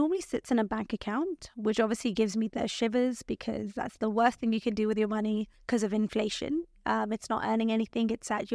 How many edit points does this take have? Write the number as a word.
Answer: one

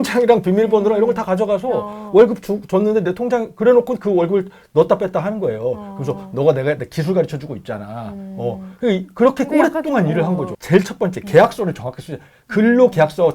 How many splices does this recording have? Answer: one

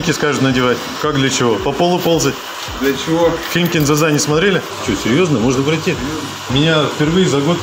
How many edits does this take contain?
three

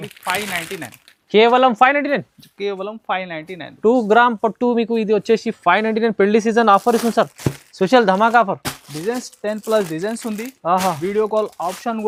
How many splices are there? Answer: zero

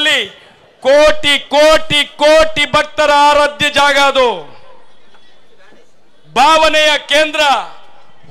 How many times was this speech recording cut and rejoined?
zero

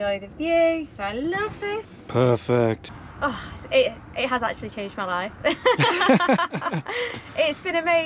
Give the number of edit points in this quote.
one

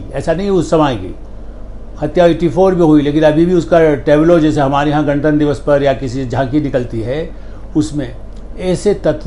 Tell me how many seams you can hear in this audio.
zero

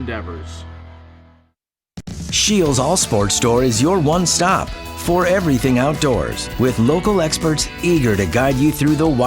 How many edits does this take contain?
one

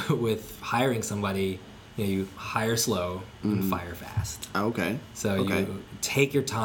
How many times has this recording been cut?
zero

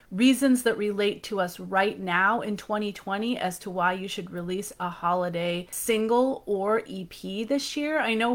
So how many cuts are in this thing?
one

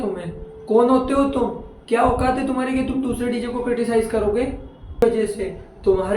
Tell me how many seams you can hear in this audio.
one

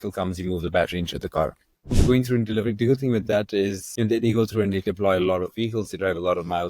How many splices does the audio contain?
two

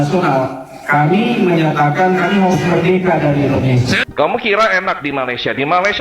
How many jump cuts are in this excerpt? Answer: one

